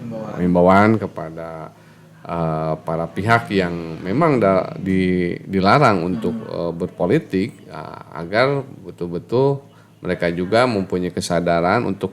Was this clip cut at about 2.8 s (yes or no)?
no